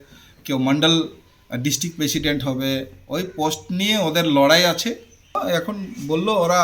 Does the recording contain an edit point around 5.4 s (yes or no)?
yes